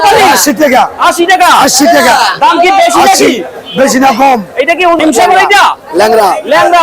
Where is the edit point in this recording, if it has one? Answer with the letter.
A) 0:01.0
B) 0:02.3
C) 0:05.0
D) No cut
C